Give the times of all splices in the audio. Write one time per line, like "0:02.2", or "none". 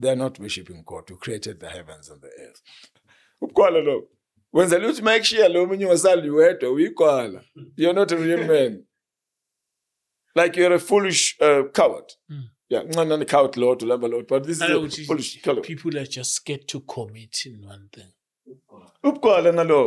0:02.8